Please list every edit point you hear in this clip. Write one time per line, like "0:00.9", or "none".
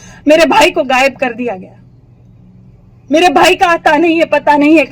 none